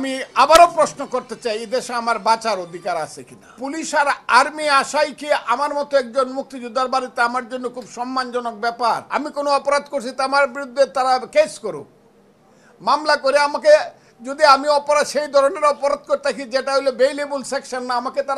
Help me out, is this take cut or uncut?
cut